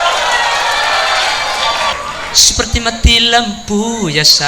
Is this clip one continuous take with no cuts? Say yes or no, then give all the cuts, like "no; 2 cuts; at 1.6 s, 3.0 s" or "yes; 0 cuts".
no; 1 cut; at 1.9 s